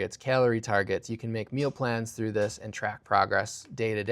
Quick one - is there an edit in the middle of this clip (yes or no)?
no